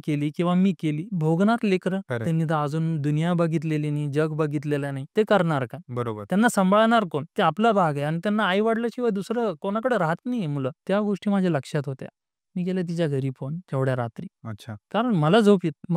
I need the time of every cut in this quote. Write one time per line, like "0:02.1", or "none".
none